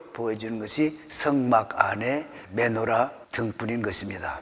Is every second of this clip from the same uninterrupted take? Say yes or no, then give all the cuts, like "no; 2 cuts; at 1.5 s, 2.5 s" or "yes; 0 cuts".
no; 2 cuts; at 2.4 s, 3.2 s